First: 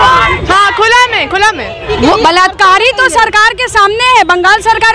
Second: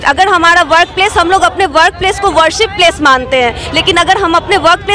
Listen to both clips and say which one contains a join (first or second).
first